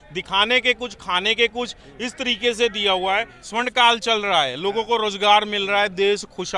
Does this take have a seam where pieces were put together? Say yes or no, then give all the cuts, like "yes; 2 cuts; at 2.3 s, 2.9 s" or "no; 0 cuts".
yes; 1 cut; at 3.4 s